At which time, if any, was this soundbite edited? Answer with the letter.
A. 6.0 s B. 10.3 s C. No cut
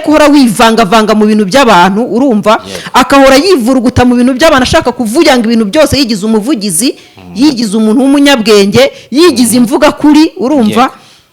C